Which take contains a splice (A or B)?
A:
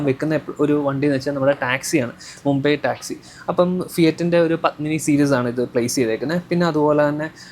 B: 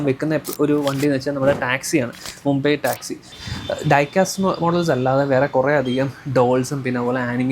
B